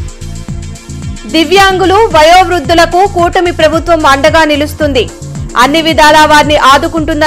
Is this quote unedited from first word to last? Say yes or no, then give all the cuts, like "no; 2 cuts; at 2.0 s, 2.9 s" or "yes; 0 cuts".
no; 1 cut; at 1.0 s